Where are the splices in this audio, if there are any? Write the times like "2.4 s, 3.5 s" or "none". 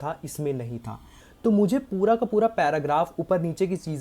none